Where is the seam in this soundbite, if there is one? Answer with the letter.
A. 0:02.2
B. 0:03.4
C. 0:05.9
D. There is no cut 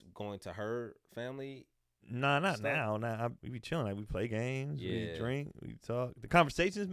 B